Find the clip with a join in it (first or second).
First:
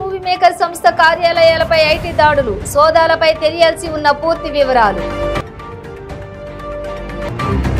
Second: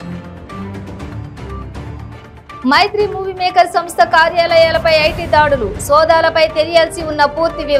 second